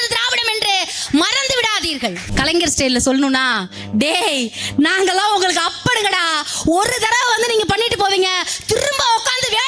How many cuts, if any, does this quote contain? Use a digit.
1